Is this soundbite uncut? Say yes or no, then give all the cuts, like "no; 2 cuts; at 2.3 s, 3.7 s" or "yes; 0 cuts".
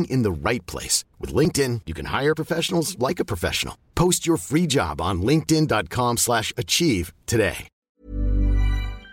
no; 1 cut; at 7.7 s